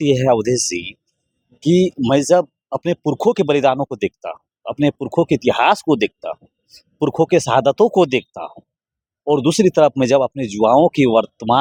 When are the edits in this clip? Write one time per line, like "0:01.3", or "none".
none